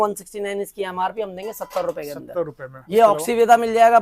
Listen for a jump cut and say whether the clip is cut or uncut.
cut